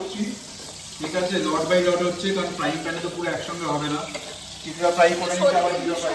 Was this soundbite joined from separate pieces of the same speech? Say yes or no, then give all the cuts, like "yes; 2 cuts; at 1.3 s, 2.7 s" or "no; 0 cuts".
no; 0 cuts